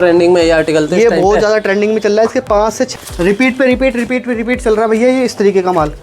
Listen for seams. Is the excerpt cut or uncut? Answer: cut